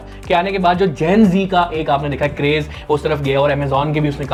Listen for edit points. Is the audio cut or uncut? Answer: uncut